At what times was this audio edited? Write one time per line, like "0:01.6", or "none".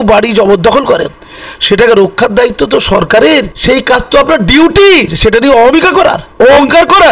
0:03.5
0:05.1
0:06.2